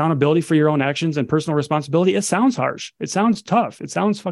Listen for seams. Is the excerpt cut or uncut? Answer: uncut